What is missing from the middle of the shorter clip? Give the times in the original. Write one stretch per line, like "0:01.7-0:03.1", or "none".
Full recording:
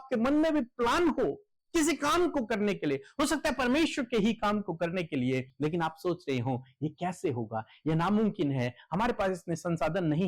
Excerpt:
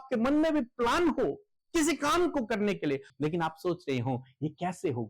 0:03.1-0:05.5

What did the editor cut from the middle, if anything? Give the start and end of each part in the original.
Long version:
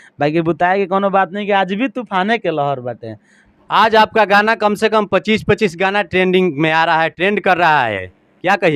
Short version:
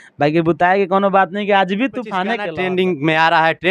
0:02.4-0:06.0

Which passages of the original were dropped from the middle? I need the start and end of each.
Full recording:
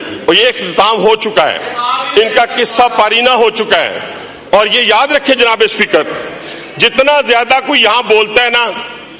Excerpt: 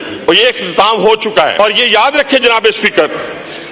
0:01.6-0:04.6

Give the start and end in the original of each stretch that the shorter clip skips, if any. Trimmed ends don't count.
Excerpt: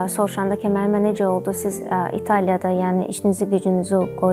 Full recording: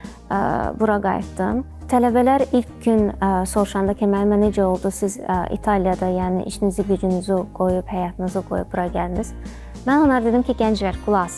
none

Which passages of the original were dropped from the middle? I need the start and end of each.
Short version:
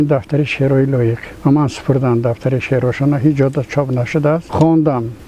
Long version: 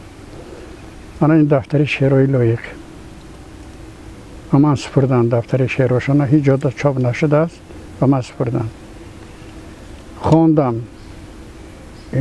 0:02.7-0:04.4
0:07.5-0:10.2

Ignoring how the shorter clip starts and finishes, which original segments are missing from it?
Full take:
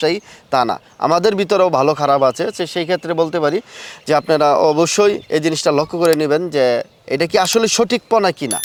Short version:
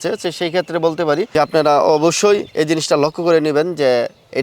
0:03.6-0:04.0

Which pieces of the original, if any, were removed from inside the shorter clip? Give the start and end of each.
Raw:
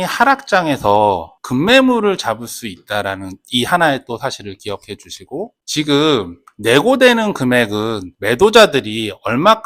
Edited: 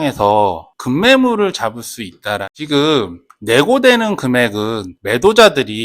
0:03.2-0:05.7

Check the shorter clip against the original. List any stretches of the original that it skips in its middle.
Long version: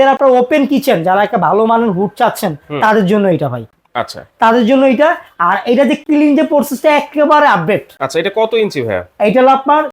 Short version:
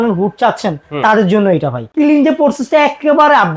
0:03.7-0:06.0

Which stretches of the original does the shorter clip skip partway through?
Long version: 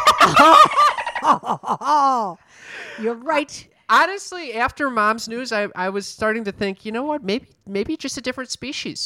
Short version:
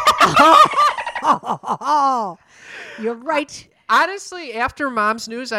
none

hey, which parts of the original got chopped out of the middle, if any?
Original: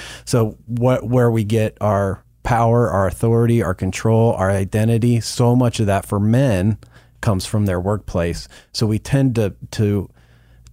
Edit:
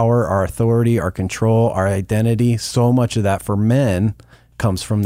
none

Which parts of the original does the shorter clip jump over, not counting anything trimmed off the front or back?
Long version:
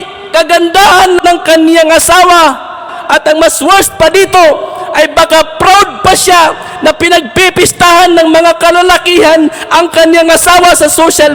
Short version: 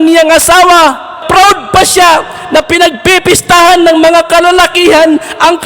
0:02.8-0:05.5

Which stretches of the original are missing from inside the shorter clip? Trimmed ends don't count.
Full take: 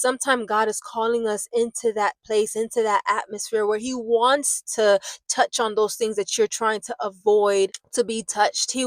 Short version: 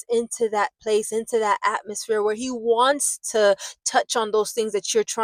none

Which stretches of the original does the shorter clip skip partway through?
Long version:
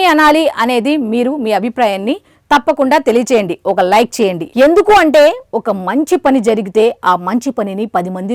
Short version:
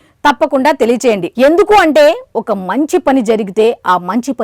0:03.5-0:04.5

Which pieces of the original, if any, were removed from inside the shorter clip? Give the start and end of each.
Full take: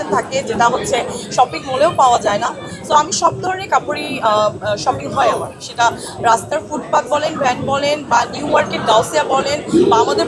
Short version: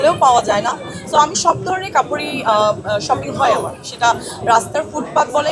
none

